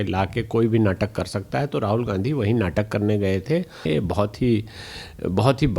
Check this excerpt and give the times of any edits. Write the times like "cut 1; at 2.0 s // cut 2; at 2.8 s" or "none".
cut 1; at 3.9 s